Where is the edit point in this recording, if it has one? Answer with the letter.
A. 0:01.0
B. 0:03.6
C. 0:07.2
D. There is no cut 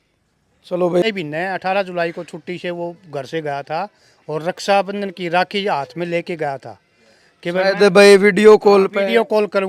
A